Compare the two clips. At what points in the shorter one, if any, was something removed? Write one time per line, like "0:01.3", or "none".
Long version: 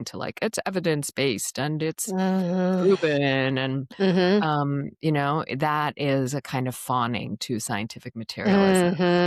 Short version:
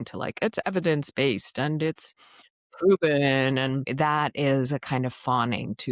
0:03.9